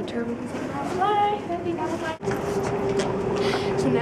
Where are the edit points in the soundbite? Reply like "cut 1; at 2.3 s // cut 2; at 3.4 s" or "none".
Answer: cut 1; at 2.1 s